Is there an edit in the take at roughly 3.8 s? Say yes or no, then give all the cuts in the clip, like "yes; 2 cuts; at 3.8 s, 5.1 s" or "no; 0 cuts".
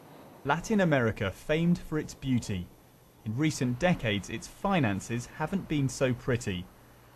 yes; 1 cut; at 3.8 s